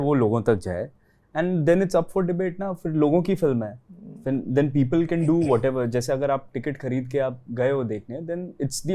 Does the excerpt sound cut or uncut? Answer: uncut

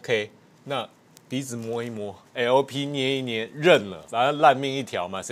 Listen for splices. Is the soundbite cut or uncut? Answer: cut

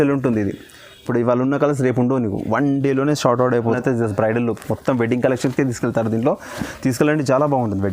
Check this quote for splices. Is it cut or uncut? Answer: cut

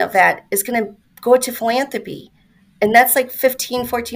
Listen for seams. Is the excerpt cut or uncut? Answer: uncut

